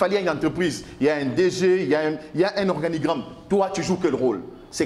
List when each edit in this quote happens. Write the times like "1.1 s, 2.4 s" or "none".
none

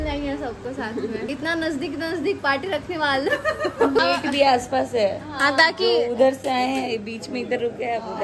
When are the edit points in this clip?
1.3 s, 4.0 s

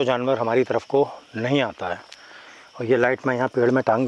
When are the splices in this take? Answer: none

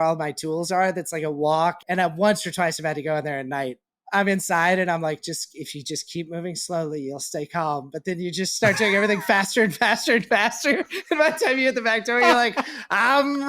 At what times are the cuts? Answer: 1.8 s, 3.9 s

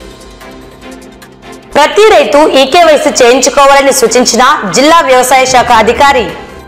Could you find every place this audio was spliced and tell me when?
1.5 s

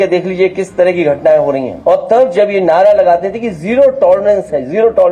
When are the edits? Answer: 1.7 s

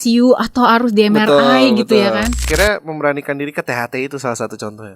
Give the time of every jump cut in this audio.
2.5 s

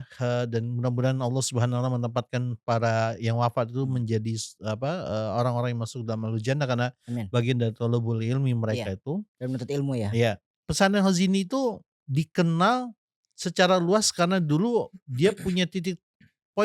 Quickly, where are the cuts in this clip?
none

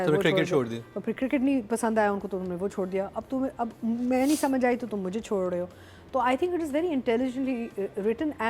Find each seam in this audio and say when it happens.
none

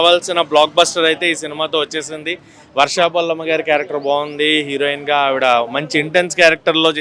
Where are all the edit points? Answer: none

